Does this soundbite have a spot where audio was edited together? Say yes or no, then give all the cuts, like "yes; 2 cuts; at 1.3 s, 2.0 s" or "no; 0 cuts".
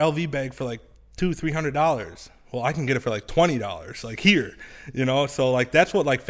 no; 0 cuts